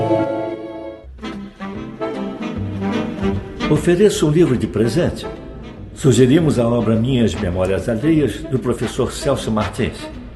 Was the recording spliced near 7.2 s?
no; 1 cut; at 1.1 s

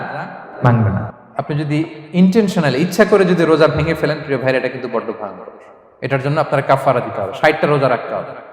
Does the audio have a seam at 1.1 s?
yes; 1 cut; at 1.1 s

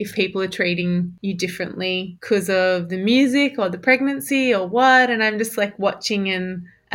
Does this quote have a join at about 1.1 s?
yes; 2 cuts; at 1.1 s, 2.1 s

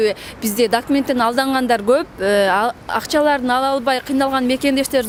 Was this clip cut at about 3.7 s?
no; 0 cuts

